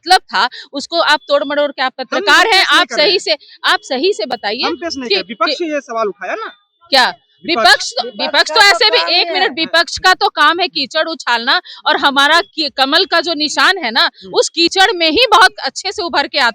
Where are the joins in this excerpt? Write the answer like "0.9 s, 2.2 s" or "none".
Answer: none